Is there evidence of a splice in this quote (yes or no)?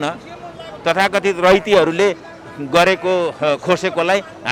no